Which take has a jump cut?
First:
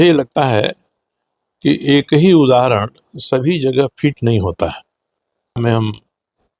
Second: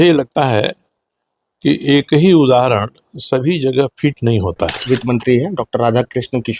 second; 1 cut; at 4.8 s

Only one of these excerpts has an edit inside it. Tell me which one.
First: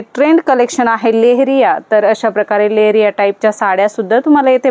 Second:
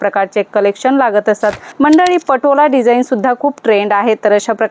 second; 1 cut; at 1.6 s

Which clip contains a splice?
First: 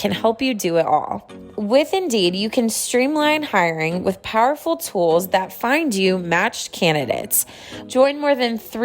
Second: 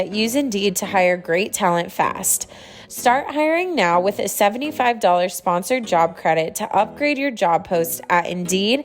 first; 1 cut; at 7.7 s

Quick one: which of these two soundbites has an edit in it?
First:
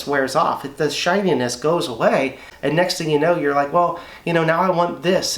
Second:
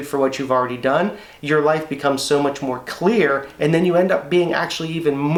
first; 1 cut; at 2.5 s

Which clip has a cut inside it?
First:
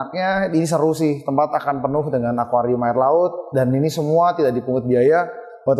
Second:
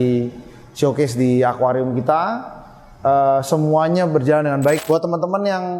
second; 1 cut; at 4.8 s

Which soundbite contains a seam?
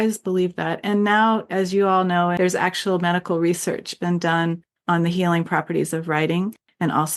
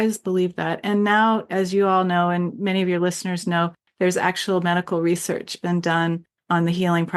first; 1 cut; at 2.3 s

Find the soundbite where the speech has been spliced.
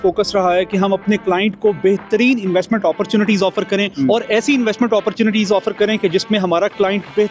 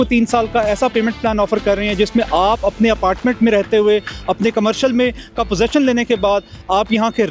first; 1 cut; at 3.9 s

